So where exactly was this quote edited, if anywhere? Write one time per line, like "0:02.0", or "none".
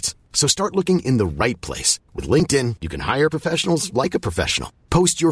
none